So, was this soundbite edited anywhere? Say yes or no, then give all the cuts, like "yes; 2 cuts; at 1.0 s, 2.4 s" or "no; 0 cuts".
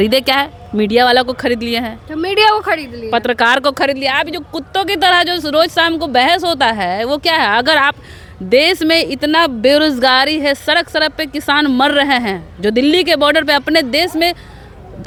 no; 0 cuts